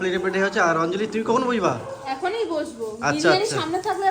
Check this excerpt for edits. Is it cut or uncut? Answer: uncut